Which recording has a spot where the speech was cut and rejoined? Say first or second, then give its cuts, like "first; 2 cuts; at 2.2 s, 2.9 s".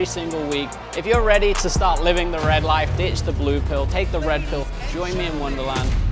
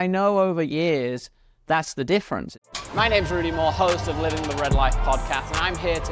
second; 1 cut; at 2.5 s